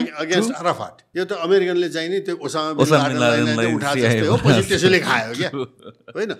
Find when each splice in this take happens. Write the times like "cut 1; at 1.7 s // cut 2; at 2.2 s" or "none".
cut 1; at 1.1 s